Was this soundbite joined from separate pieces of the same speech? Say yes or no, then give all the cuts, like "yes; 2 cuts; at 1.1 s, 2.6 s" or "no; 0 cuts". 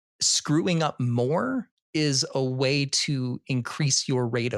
no; 0 cuts